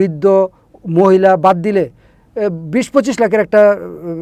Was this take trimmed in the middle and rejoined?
no; 0 cuts

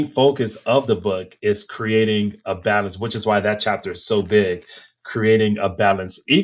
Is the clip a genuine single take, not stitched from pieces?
yes; 0 cuts

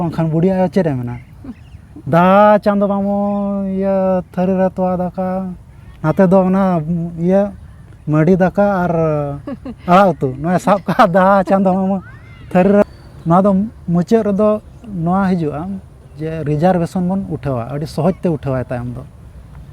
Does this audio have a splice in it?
yes; 1 cut; at 12.8 s

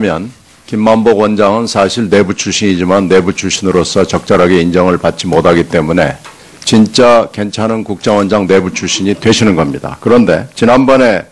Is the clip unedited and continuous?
no; 1 cut; at 4.2 s

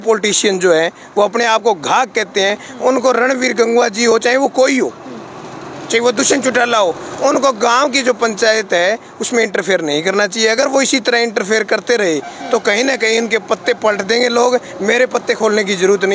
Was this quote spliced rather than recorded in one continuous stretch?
no; 0 cuts

